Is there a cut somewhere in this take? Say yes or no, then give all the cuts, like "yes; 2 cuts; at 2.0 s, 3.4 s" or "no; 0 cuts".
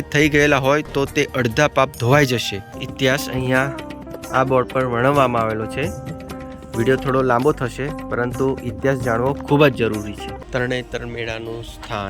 yes; 2 cuts; at 2.8 s, 10.4 s